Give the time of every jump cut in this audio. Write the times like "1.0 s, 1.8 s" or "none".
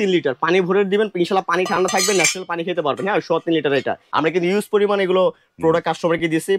4.0 s